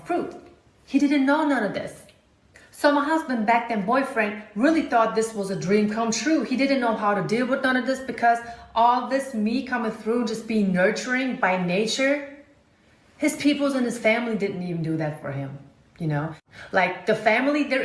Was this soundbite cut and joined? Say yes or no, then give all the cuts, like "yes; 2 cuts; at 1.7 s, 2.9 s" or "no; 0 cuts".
yes; 1 cut; at 16.8 s